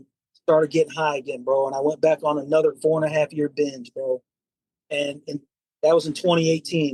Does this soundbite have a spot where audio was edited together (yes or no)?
no